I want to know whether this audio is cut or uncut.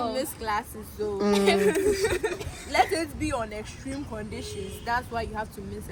uncut